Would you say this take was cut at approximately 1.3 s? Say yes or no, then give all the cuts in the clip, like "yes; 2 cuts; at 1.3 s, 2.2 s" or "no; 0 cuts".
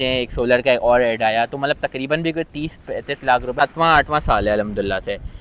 no; 1 cut; at 3.6 s